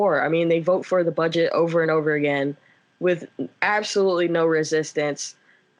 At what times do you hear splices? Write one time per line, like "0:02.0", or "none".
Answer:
none